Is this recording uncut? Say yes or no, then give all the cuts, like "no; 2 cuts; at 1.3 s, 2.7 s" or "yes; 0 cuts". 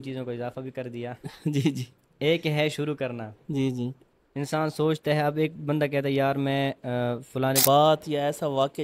no; 1 cut; at 7.6 s